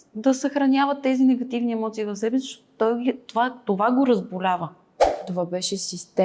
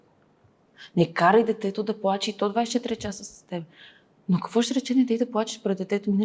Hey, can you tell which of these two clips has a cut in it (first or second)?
first